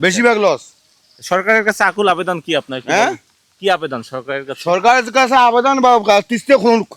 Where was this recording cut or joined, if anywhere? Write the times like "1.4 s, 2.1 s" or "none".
none